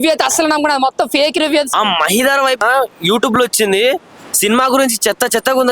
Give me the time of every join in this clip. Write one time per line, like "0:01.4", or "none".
0:01.7
0:02.6